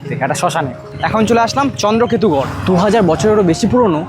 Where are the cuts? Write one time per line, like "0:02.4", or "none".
0:00.9
0:02.5